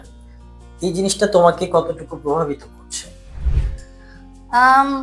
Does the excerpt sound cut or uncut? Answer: uncut